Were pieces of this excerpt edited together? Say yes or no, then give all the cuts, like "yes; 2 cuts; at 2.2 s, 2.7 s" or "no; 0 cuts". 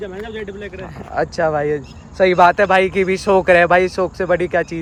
no; 0 cuts